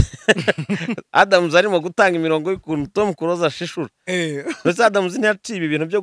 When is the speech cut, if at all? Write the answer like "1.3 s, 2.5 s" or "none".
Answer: none